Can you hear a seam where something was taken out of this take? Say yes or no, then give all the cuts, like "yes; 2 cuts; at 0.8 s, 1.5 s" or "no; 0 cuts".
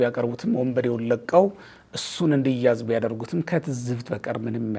no; 0 cuts